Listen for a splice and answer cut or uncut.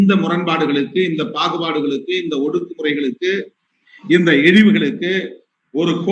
uncut